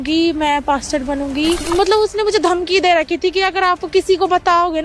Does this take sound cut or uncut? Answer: cut